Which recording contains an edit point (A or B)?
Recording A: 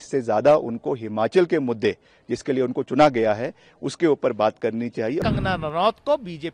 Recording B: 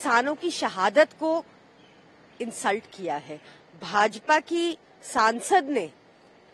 A